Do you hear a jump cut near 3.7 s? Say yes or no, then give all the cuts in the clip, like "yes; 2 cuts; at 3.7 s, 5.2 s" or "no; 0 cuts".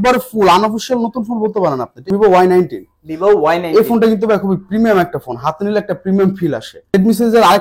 no; 2 cuts; at 2.0 s, 6.9 s